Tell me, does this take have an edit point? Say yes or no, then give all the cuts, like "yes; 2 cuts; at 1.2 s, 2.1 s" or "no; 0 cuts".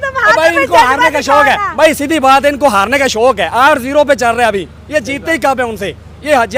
no; 0 cuts